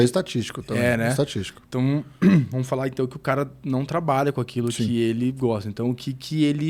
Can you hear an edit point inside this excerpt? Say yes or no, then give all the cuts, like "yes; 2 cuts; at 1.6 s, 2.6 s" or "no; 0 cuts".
no; 0 cuts